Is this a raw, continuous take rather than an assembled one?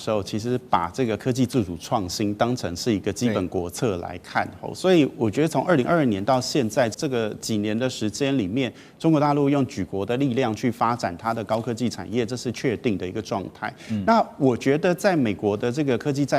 no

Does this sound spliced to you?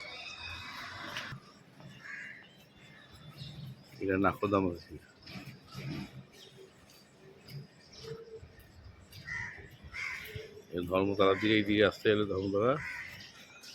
yes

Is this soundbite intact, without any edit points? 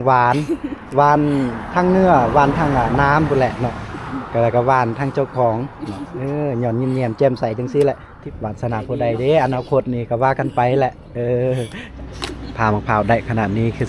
no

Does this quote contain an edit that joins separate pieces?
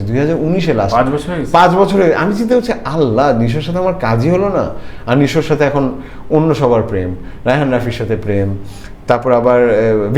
no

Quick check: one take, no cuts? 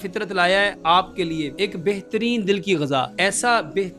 no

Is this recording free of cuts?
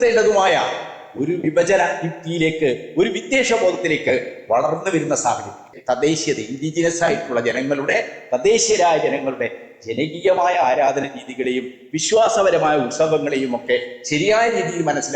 no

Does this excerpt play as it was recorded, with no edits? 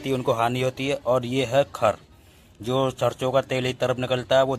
yes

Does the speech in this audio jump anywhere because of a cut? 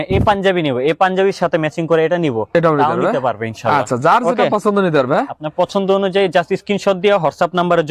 no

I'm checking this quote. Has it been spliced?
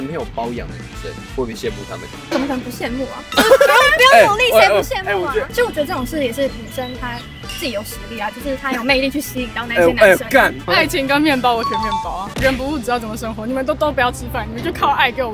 yes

